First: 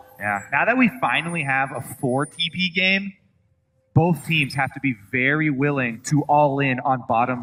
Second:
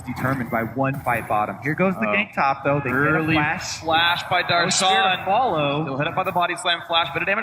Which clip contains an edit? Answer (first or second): second